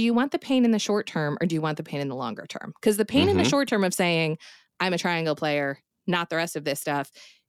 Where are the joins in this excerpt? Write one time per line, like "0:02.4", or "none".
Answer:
none